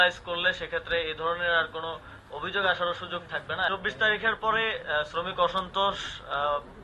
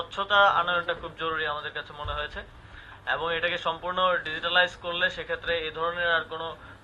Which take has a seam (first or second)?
first